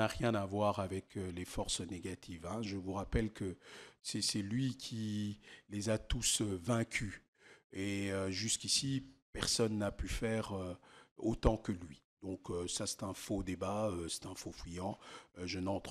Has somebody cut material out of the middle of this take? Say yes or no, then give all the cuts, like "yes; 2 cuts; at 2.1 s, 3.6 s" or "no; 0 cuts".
no; 0 cuts